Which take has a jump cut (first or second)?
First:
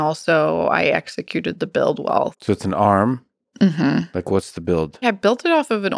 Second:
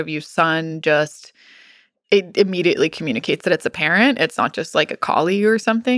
first